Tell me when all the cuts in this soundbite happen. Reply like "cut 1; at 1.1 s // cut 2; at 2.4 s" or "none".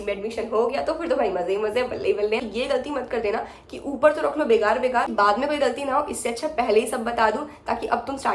cut 1; at 2.5 s // cut 2; at 5.1 s